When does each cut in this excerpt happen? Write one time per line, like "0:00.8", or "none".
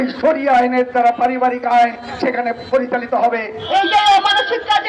0:03.6